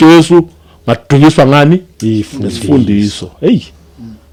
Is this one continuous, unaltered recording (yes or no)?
yes